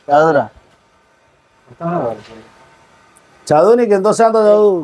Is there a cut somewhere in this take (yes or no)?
no